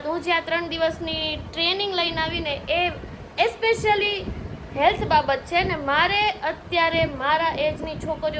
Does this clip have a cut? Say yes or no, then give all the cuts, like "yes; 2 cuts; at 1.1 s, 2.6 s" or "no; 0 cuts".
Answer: no; 0 cuts